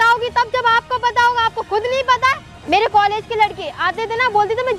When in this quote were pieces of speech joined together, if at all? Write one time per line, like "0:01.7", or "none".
0:02.5